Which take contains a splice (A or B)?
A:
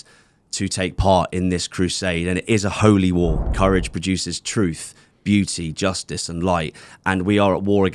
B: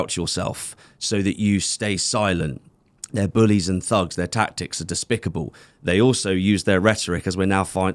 A